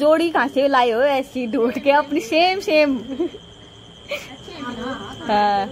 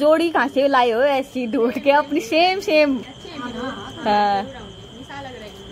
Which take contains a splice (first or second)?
second